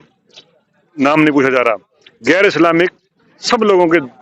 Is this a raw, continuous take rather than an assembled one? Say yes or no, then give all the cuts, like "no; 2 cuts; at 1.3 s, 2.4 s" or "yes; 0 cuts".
yes; 0 cuts